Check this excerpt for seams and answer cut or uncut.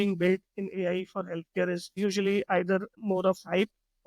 cut